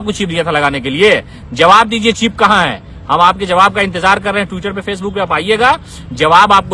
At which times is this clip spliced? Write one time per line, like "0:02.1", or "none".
none